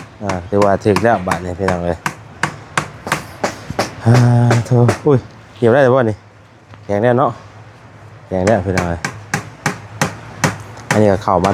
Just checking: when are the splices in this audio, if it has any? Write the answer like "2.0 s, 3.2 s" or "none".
none